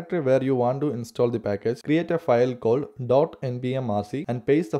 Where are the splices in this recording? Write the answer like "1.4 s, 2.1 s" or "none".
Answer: none

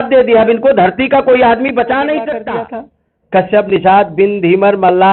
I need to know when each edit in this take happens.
2.4 s

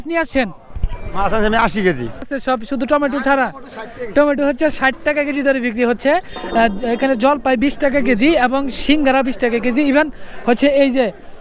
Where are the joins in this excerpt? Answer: 2.3 s

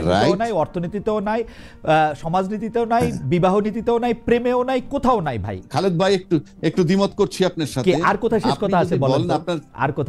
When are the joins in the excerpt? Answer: 5.5 s

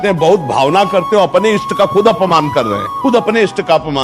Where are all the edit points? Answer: 2.8 s

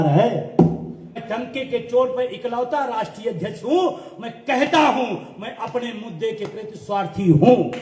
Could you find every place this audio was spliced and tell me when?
1.2 s

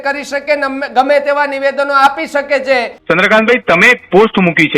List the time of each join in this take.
2.9 s

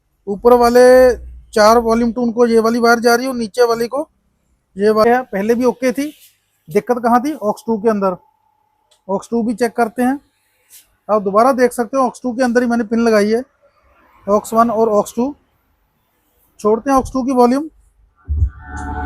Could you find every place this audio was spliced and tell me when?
5.0 s

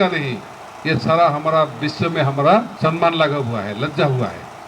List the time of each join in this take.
2.7 s

